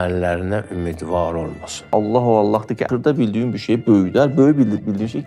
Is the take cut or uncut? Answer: cut